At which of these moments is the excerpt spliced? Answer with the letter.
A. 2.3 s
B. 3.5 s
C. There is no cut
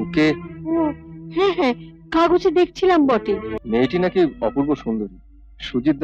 B